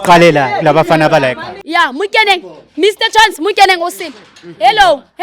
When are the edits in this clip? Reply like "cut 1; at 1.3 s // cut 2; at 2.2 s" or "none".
cut 1; at 1.5 s